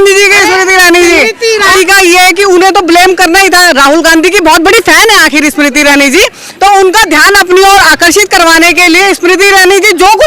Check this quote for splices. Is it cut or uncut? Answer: cut